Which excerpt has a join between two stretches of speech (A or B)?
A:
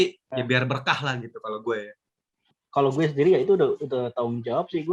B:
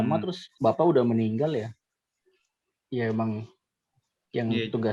A